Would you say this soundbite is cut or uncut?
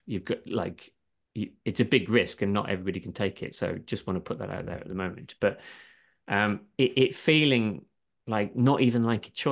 uncut